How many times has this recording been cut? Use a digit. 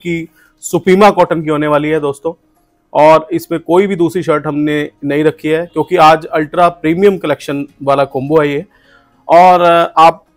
0